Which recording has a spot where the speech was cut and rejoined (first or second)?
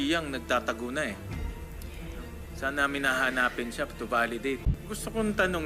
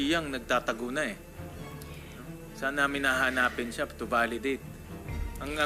first